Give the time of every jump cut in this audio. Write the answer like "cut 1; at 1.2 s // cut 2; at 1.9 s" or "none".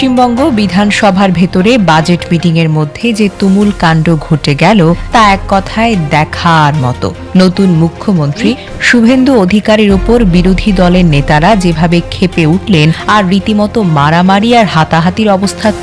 cut 1; at 5.0 s // cut 2; at 13.0 s

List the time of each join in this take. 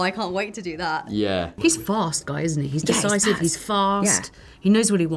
cut 1; at 1.5 s

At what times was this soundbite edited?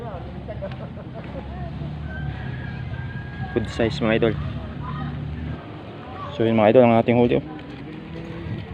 cut 1; at 5.6 s

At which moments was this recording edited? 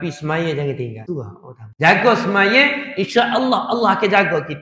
cut 1; at 1.1 s

